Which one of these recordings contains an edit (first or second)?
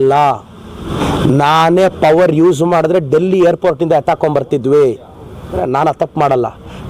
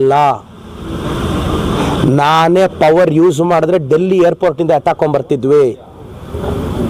first